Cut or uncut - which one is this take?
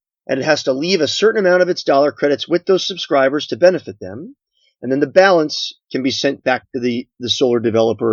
uncut